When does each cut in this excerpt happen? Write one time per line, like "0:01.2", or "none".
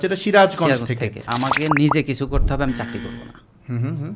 0:01.3

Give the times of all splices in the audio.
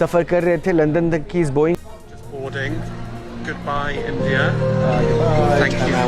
0:01.8

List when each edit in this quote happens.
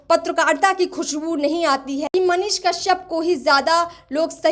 0:02.0

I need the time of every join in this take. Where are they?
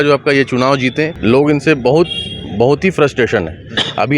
0:01.1

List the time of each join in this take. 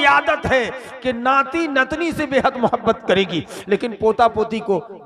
none

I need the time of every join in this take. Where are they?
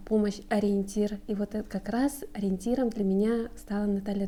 none

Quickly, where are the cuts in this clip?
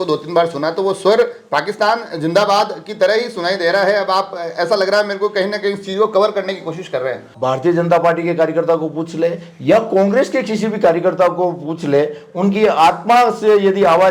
0:07.3

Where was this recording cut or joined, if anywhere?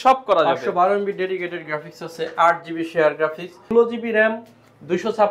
0:03.7

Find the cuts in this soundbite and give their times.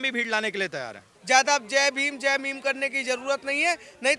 0:01.1

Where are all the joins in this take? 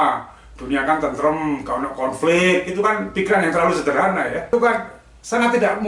0:04.5

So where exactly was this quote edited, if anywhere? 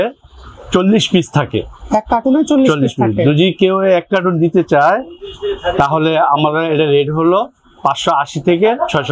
none

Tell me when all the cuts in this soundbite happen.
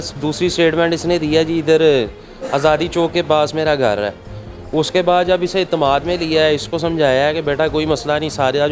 none

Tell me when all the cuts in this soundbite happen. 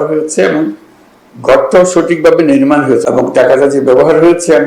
0:03.0

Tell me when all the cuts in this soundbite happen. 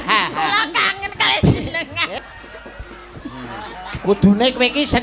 0:02.2

